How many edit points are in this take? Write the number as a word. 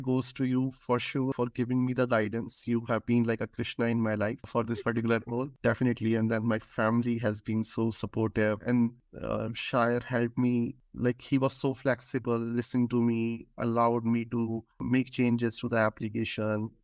zero